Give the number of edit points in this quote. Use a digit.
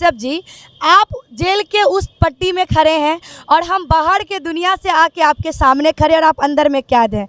0